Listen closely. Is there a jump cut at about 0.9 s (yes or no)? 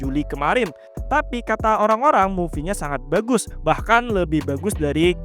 yes